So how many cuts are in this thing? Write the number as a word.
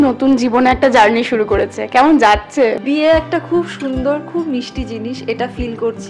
one